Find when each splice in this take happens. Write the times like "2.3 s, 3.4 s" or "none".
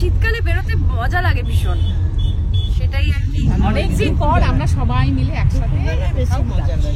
none